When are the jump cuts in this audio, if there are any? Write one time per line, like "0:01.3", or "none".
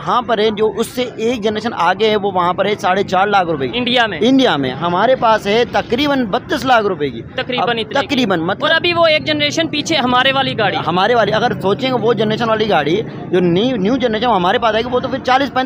none